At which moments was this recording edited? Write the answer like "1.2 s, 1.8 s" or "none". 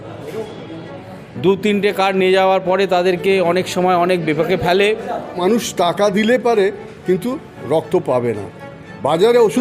5.4 s